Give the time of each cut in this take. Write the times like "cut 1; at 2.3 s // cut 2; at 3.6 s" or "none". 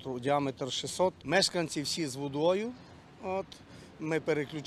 cut 1; at 1.2 s